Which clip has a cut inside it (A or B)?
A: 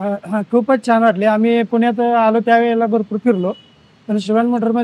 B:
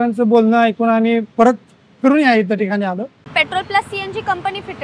B